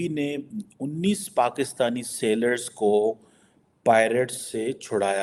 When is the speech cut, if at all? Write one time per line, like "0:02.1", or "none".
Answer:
none